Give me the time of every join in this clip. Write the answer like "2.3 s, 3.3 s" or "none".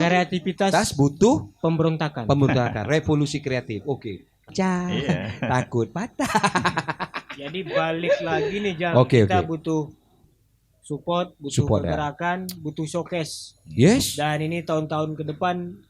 4.5 s